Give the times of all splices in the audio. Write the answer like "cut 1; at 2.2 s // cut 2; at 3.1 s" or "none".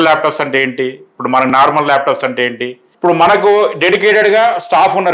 cut 1; at 2.9 s

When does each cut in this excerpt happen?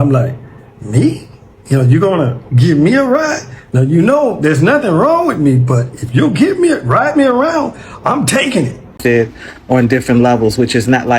cut 1; at 9.0 s

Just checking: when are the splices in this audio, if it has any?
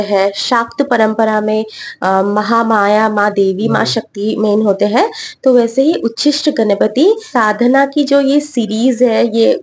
cut 1; at 7.2 s

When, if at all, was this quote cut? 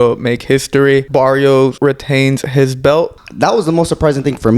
cut 1; at 1.1 s // cut 2; at 1.8 s // cut 3; at 3.2 s

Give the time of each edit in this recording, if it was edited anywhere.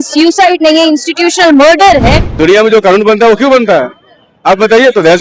cut 1; at 2.2 s

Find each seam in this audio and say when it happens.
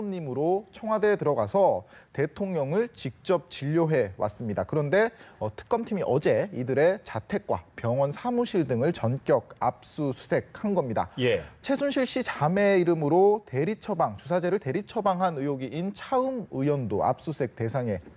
none

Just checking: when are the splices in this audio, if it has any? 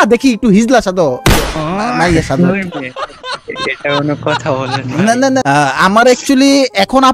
cut 1; at 5.4 s

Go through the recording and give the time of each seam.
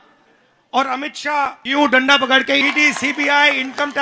cut 1; at 1.6 s // cut 2; at 2.6 s

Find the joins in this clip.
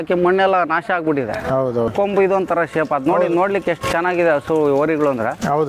cut 1; at 1.9 s

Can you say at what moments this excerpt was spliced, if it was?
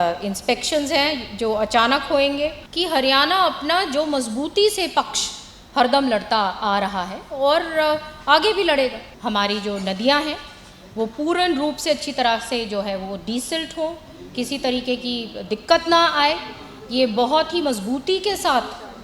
cut 1; at 2.7 s // cut 2; at 9.1 s

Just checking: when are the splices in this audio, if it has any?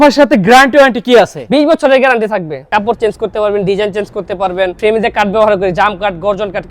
cut 1; at 2.7 s // cut 2; at 4.7 s

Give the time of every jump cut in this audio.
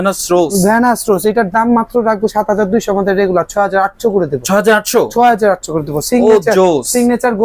none

